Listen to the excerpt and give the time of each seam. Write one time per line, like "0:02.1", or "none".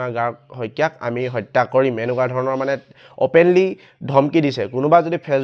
none

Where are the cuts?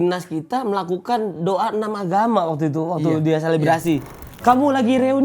0:04.1

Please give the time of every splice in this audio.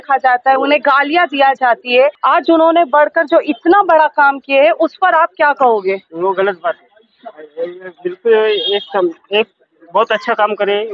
0:02.2

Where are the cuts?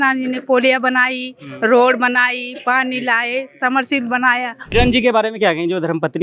0:04.7

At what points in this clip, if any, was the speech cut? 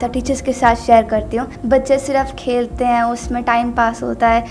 0:01.5

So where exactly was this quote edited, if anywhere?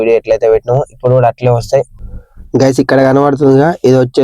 0:02.0

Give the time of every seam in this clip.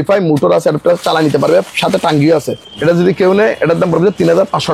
0:02.7

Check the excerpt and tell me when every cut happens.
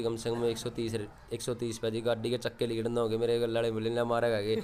none

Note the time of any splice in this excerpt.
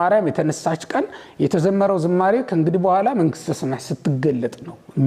none

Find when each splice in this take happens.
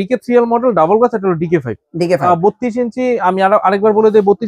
0:02.2

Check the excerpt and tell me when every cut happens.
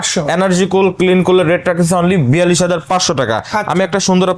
none

